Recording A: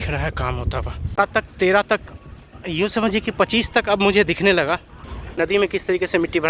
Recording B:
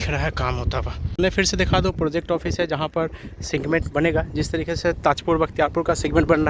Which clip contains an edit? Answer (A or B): A